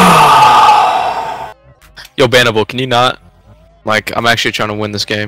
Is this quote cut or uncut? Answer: uncut